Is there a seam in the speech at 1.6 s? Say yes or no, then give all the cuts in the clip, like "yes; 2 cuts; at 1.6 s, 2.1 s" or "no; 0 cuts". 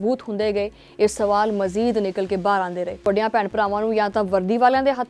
no; 1 cut; at 3.1 s